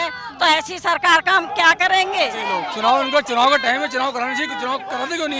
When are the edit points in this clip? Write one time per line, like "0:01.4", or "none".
0:02.5